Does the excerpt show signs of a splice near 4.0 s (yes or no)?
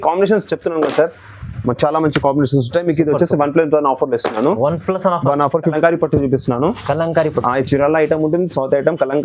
no